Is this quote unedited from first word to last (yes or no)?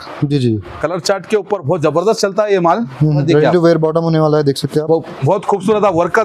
no